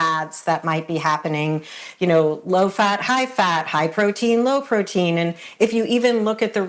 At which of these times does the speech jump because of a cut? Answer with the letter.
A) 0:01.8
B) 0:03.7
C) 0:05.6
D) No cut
A